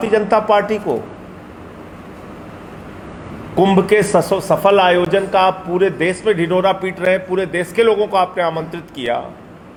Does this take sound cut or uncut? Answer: uncut